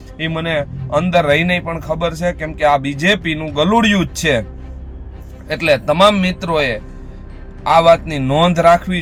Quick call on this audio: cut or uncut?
uncut